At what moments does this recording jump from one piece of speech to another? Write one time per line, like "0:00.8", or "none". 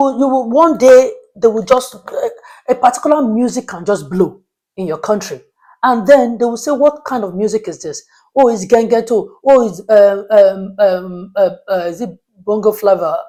none